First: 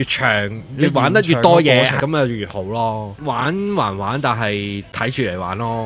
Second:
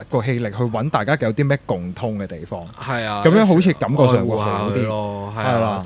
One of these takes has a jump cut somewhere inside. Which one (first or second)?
first